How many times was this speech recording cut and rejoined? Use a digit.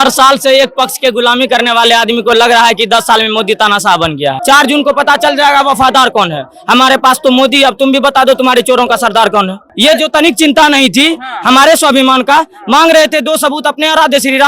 2